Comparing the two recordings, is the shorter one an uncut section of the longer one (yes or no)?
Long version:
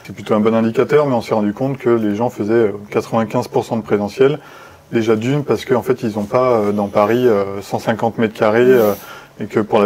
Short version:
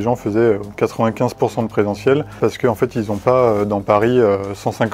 no